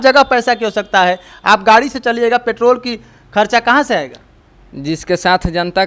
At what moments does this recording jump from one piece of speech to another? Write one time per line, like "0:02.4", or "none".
none